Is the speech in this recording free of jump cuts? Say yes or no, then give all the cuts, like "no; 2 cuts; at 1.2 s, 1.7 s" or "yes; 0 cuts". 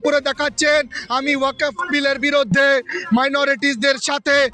yes; 0 cuts